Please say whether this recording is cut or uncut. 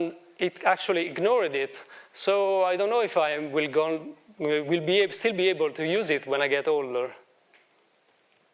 uncut